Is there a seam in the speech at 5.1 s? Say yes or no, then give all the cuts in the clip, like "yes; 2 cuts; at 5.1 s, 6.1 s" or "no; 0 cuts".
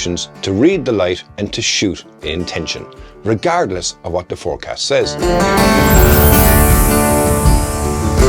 yes; 1 cut; at 5.1 s